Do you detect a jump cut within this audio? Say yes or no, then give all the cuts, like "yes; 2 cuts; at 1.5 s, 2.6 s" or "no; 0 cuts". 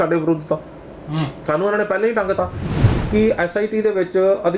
yes; 1 cut; at 2.7 s